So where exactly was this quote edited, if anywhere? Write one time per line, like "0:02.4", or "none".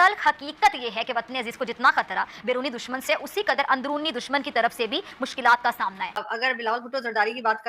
0:06.2